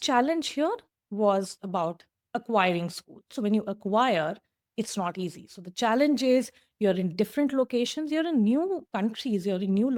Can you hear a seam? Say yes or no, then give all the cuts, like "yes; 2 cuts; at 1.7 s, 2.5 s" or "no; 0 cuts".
no; 0 cuts